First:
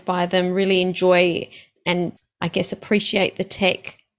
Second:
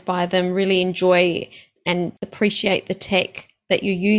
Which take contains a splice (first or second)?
second